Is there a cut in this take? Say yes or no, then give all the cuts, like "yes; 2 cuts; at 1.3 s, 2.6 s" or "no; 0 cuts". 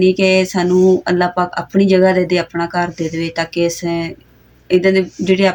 no; 0 cuts